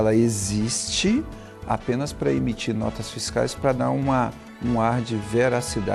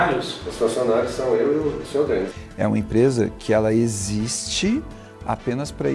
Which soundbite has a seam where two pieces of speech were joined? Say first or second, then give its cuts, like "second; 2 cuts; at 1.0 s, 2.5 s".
second; 1 cut; at 2.3 s